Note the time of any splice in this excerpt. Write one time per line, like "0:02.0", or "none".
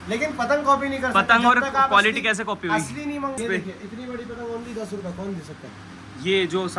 0:03.4

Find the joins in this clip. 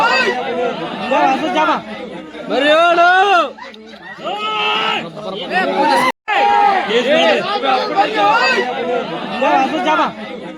0:06.1

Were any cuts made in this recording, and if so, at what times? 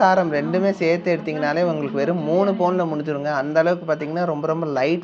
none

